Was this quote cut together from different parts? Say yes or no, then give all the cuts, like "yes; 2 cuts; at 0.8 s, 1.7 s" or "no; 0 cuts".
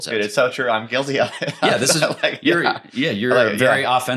no; 0 cuts